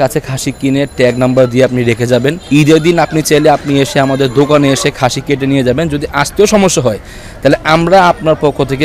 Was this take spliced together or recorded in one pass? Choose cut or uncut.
uncut